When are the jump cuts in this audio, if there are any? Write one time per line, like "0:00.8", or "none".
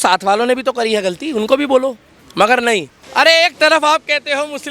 0:03.0